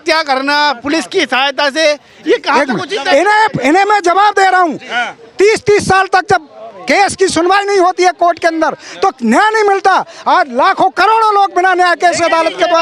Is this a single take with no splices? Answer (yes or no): yes